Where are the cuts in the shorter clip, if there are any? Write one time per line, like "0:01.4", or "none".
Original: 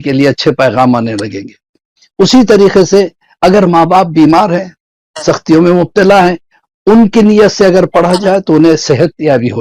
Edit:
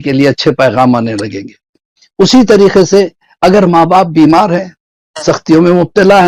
none